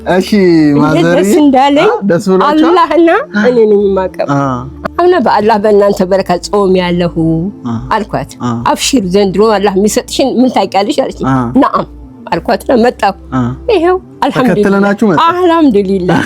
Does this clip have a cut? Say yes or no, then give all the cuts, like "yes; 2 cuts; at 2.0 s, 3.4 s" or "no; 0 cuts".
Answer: yes; 1 cut; at 4.7 s